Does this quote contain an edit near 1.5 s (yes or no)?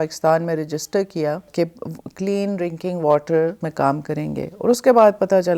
yes